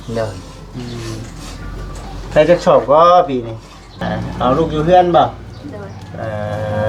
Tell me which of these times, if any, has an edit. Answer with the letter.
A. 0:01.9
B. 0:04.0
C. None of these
B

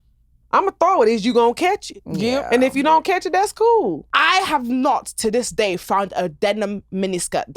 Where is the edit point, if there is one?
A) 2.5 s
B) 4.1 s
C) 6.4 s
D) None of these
B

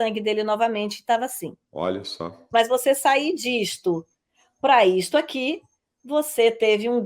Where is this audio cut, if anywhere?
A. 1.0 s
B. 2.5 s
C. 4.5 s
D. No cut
B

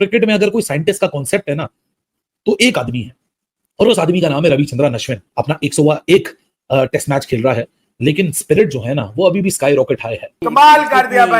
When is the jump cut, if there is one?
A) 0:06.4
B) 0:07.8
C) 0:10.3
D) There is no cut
C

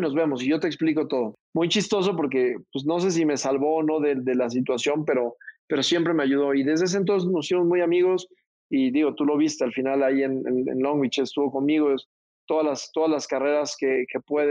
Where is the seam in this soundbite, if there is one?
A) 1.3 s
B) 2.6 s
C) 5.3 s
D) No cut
A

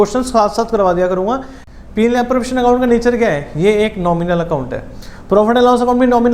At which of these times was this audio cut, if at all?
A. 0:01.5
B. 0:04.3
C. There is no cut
A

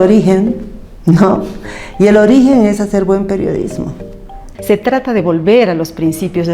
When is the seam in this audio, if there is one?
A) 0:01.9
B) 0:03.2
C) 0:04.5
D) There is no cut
C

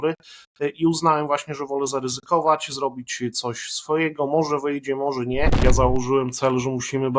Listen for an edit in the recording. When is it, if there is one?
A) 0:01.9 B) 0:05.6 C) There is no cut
B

